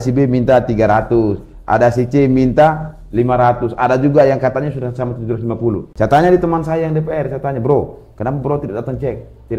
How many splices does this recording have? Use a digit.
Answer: 1